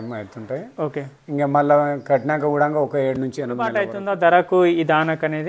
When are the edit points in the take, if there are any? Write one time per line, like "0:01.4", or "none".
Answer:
0:03.9